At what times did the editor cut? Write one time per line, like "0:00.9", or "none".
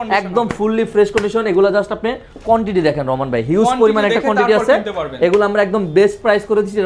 none